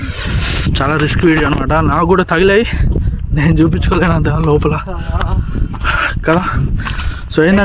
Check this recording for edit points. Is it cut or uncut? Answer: uncut